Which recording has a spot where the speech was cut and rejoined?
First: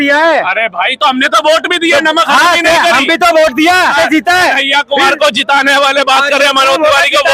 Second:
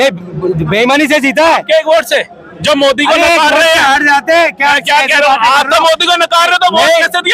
first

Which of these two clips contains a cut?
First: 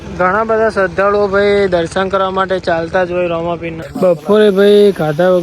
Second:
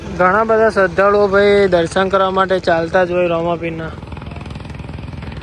first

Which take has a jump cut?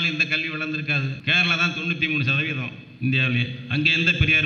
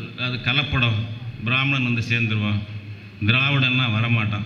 first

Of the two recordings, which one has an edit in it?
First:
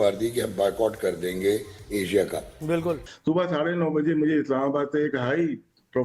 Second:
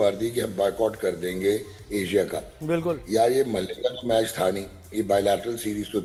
first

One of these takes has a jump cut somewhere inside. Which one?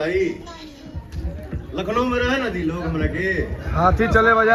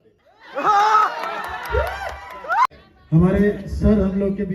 second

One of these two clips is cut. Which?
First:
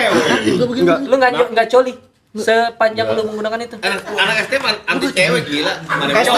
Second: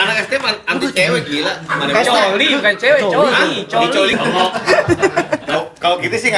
second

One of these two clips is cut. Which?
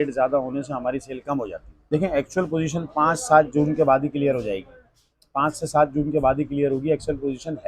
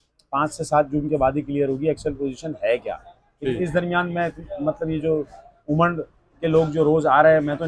first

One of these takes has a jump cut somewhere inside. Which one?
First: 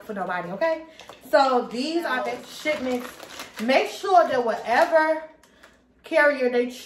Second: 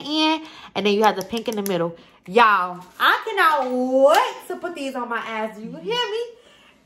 first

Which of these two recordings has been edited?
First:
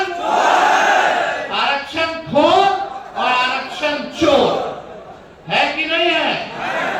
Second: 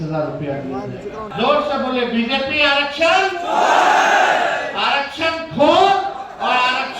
second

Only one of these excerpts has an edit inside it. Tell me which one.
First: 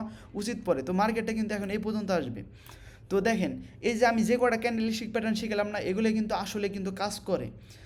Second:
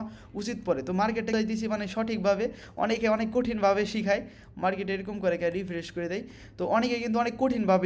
second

